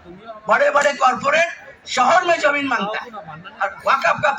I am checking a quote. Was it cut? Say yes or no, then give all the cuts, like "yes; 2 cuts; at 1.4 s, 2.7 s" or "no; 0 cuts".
no; 0 cuts